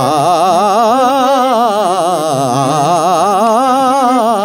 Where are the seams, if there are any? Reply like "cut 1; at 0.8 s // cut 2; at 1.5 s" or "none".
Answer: none